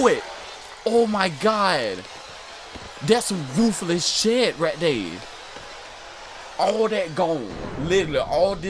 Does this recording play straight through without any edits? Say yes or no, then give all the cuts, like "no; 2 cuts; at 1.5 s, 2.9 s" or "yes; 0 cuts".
yes; 0 cuts